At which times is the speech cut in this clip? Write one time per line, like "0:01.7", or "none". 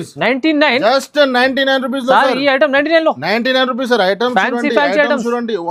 none